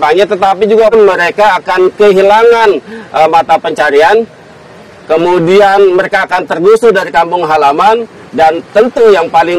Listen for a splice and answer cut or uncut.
cut